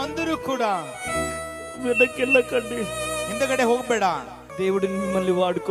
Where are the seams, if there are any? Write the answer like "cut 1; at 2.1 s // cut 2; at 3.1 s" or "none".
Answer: cut 1; at 4.4 s